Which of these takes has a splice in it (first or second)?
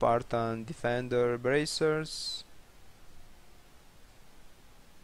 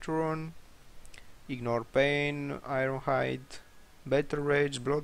second